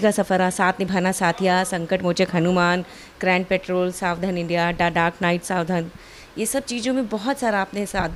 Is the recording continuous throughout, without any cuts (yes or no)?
yes